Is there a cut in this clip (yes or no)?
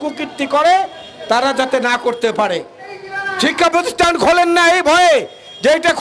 no